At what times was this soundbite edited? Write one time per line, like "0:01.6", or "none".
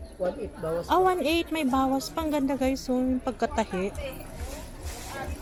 none